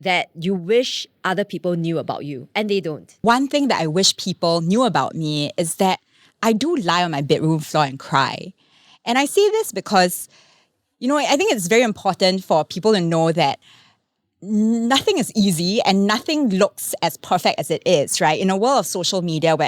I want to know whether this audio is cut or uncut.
cut